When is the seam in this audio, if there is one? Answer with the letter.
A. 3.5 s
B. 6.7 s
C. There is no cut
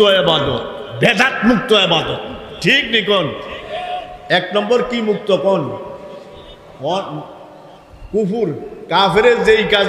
C